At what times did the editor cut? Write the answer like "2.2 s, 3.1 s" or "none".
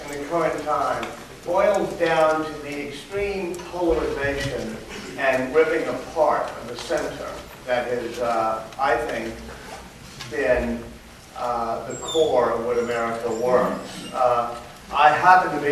7.0 s